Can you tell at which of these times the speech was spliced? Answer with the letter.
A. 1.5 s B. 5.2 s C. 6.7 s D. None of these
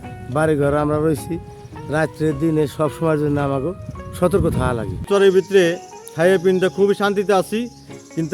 B